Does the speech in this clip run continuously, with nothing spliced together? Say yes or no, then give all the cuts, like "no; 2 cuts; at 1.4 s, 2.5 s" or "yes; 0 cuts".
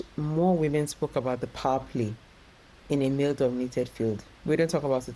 yes; 0 cuts